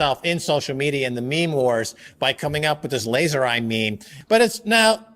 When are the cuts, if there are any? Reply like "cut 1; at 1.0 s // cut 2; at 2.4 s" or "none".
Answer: cut 1; at 4.1 s